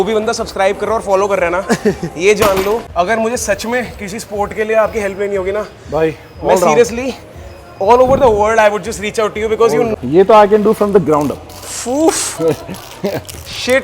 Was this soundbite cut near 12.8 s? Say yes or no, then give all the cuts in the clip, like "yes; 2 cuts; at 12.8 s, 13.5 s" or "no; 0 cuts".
no; 2 cuts; at 2.9 s, 9.9 s